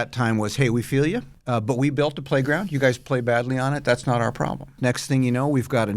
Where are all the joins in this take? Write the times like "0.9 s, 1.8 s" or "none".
1.3 s, 4.7 s